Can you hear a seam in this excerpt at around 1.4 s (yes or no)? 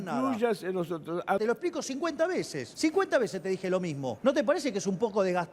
yes